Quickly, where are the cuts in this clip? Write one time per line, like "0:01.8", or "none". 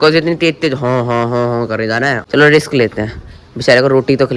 0:02.2